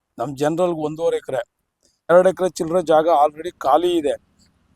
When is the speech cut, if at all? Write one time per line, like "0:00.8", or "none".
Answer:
0:02.1